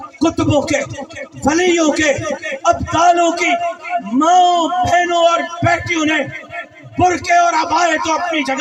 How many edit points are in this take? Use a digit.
0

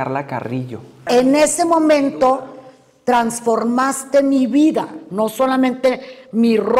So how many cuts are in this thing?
1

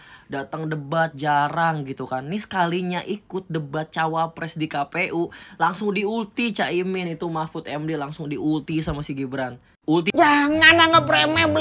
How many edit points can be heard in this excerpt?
1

